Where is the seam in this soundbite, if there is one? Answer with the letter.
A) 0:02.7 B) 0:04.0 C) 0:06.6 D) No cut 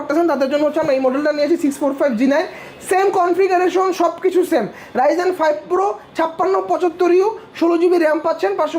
D